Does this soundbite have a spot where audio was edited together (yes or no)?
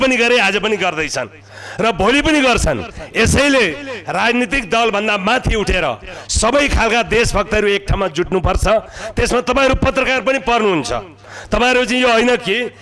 no